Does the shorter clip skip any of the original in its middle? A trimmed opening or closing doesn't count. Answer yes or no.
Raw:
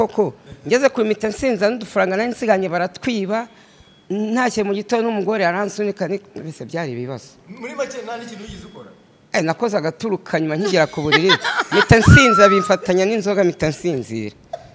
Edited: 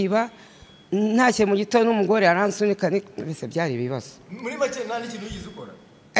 no